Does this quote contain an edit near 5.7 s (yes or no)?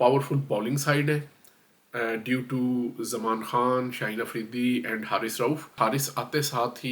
yes